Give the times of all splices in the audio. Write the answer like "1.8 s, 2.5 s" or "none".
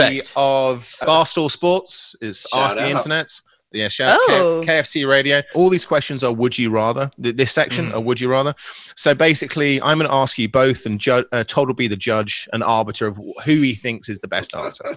1.0 s, 5.5 s